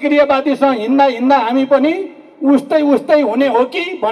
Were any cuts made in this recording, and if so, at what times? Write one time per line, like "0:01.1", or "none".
none